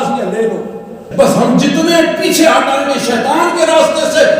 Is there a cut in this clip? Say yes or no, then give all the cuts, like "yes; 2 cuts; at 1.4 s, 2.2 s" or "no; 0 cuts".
yes; 1 cut; at 1.1 s